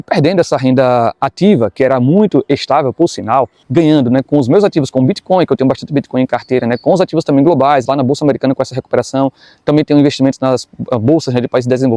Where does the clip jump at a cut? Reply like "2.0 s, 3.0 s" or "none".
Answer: 3.6 s